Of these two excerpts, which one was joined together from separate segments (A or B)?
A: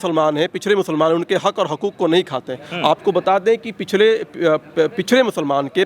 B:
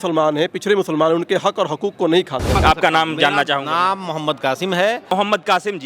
B